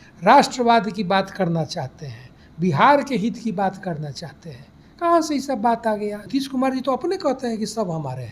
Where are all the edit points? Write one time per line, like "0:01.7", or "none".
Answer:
0:06.2